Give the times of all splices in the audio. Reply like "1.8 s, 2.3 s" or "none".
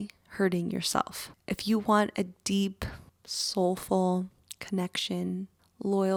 none